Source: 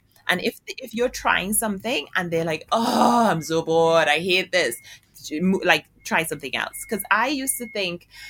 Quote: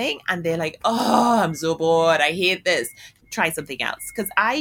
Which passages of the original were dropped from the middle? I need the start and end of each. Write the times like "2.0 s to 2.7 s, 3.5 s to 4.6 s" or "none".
5.1 s to 5.9 s